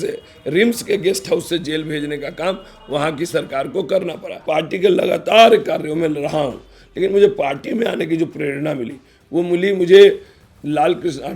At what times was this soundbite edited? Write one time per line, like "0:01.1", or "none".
0:04.4